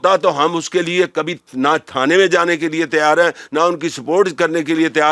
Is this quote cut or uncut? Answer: uncut